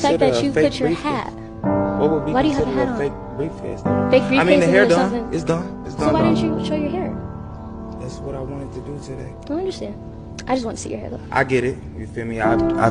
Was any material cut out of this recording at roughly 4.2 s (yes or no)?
yes